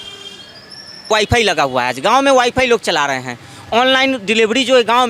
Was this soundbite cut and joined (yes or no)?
yes